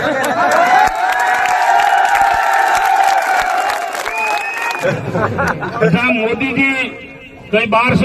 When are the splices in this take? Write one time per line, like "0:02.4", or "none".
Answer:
0:04.7